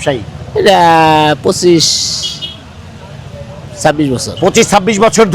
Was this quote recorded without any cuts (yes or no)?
yes